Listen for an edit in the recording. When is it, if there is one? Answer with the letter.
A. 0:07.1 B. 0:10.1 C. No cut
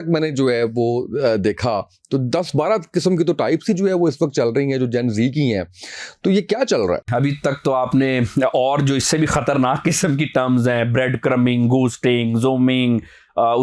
A